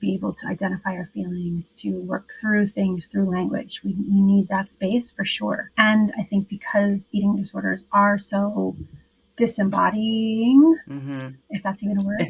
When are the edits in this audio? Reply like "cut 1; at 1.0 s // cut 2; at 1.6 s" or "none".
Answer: cut 1; at 5.7 s